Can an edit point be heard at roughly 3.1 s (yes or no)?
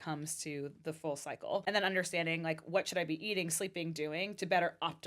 no